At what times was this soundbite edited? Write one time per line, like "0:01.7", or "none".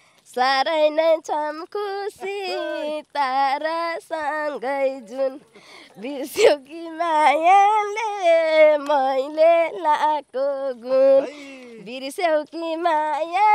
none